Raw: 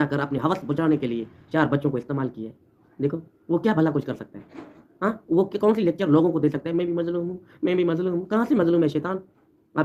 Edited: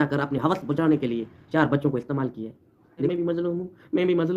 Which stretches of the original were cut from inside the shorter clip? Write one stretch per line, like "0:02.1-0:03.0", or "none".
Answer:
0:03.1-0:06.8